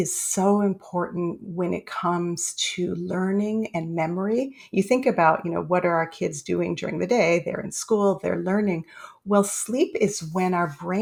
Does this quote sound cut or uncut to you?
uncut